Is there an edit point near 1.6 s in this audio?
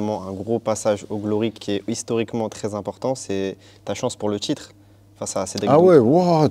yes; 1 cut; at 1.6 s

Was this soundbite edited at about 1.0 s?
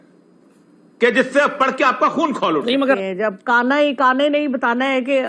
no; 1 cut; at 3.0 s

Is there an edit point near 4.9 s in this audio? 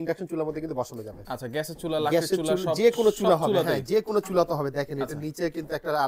no; 0 cuts

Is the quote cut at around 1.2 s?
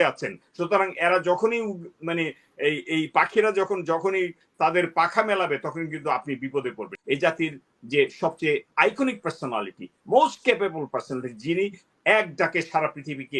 no; 1 cut; at 7.0 s

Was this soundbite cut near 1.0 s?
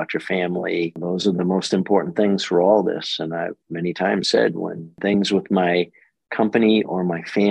yes; 2 cuts; at 1.0 s, 4.9 s

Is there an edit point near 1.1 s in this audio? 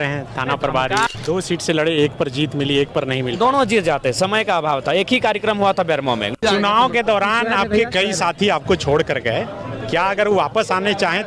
yes; 2 cuts; at 1.1 s, 6.3 s

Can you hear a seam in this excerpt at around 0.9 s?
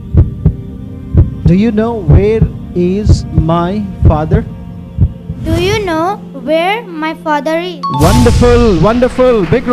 yes; 1 cut; at 0.9 s

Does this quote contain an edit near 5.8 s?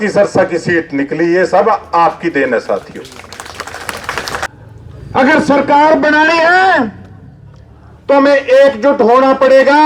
no; 1 cut; at 4.5 s

